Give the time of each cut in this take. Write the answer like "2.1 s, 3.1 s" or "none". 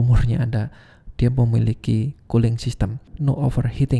3.1 s